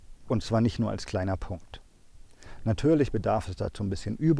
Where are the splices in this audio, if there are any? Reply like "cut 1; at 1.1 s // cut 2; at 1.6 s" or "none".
none